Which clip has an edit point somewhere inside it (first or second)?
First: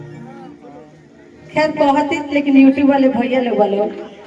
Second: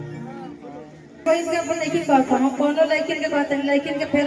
second